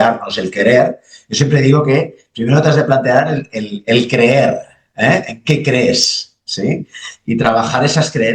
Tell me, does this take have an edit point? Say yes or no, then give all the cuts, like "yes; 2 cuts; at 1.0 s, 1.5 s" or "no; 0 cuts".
no; 0 cuts